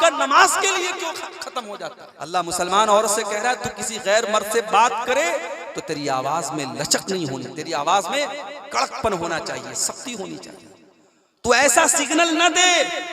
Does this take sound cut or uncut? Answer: cut